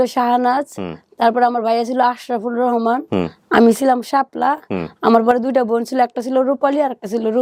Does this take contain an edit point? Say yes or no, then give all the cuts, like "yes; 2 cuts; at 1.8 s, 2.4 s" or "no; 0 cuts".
no; 0 cuts